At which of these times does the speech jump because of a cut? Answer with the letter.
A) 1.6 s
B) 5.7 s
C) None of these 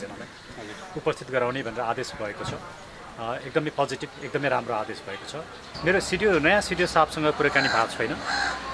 B